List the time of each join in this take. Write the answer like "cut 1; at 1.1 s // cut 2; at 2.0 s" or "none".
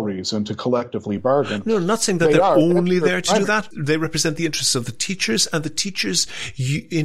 cut 1; at 3.7 s

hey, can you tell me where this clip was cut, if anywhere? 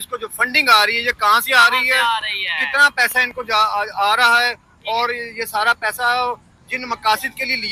none

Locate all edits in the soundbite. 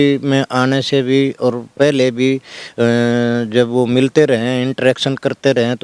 none

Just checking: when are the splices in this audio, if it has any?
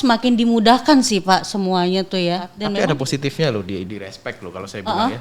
cut 1; at 2.6 s

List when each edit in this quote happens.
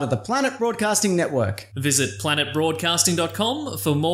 none

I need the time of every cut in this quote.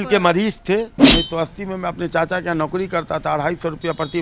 cut 1; at 0.9 s

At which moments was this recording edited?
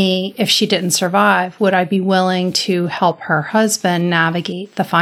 none

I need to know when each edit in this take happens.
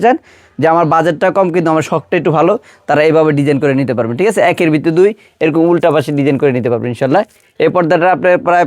none

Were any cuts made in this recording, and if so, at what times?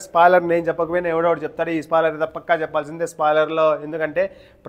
none

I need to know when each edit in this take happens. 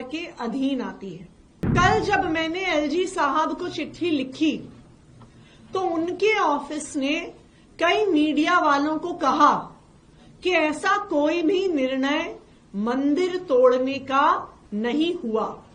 cut 1; at 1.7 s

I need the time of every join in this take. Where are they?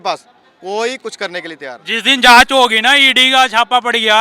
cut 1; at 1.7 s

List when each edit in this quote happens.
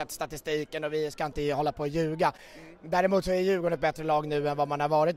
none

